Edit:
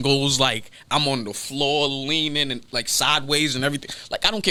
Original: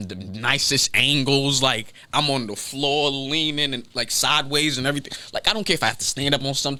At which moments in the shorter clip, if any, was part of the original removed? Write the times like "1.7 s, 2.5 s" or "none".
none